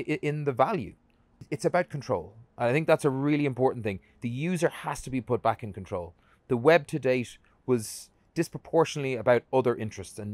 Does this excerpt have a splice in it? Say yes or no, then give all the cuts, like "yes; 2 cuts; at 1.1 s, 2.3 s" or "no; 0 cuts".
yes; 1 cut; at 1.4 s